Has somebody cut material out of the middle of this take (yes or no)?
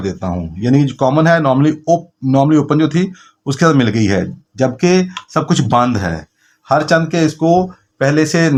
no